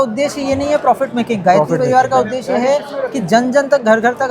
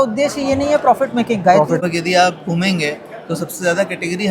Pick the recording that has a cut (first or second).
second